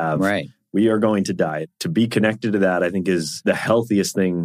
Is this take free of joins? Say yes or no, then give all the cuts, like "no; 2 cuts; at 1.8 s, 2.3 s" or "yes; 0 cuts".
no; 2 cuts; at 1.7 s, 3.3 s